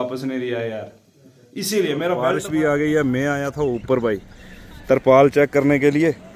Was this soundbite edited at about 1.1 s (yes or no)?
no